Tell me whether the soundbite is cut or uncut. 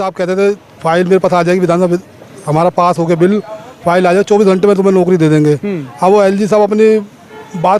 uncut